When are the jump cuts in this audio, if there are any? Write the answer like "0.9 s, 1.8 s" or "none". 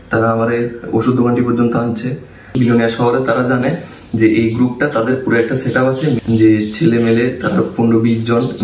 2.4 s, 6.2 s